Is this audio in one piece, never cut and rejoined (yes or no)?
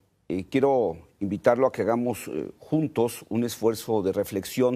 no